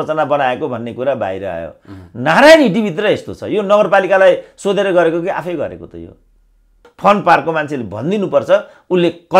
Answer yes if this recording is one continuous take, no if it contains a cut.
no